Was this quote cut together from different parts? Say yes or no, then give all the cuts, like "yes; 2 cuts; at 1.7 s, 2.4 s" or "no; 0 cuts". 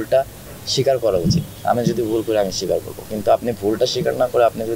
no; 0 cuts